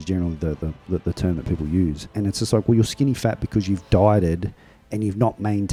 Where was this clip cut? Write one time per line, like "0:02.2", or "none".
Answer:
none